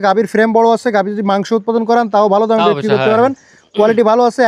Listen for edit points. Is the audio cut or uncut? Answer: uncut